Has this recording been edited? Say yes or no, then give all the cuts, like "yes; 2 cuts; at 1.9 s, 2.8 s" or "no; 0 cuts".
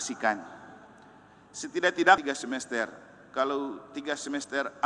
yes; 1 cut; at 2.2 s